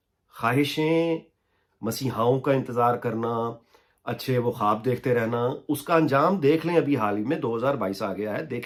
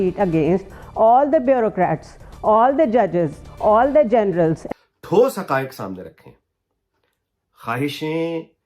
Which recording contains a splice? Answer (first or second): second